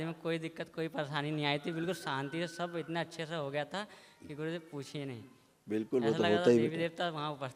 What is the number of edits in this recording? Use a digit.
0